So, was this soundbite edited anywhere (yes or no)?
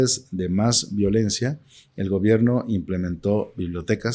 no